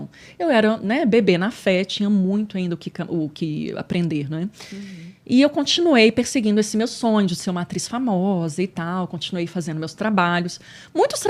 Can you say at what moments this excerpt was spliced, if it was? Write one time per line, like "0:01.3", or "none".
none

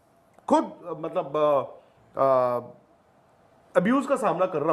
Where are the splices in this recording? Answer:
none

